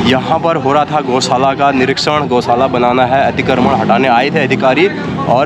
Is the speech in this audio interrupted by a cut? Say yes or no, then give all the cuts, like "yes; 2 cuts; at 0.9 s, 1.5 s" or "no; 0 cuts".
no; 0 cuts